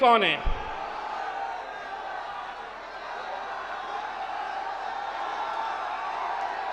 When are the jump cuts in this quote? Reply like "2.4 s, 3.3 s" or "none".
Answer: none